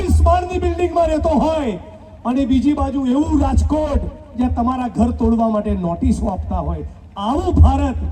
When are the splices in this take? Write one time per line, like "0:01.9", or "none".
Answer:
none